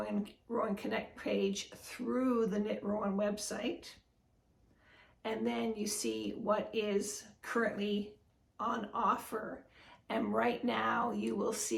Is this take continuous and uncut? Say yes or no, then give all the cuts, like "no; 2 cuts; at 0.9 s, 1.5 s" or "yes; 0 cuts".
yes; 0 cuts